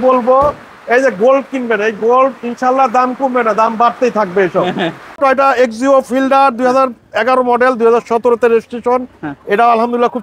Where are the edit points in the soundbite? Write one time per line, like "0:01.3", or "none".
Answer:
0:05.2